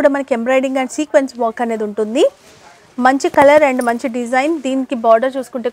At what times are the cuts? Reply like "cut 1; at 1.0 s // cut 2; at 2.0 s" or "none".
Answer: none